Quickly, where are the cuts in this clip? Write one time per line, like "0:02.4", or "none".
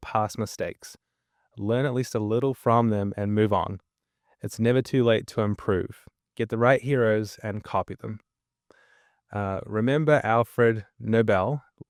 none